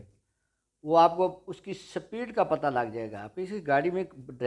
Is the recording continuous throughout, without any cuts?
yes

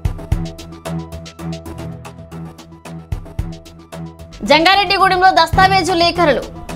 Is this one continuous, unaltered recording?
no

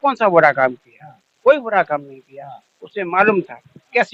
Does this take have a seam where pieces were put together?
no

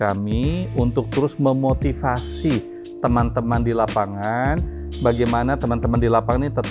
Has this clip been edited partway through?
no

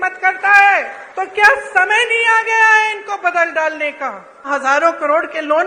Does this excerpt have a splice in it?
yes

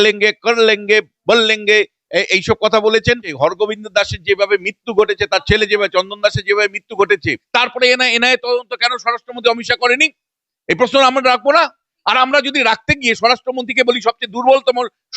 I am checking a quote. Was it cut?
yes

